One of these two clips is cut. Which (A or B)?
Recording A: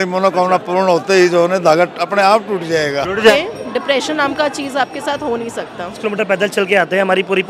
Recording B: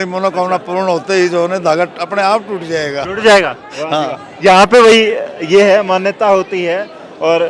A